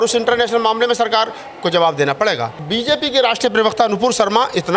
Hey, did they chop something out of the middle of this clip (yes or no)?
yes